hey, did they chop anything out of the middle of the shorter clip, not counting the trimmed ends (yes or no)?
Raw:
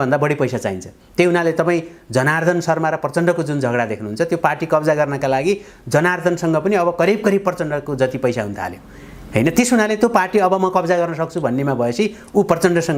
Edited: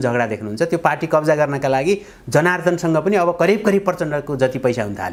no